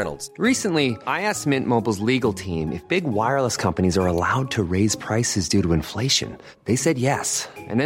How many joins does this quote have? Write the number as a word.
zero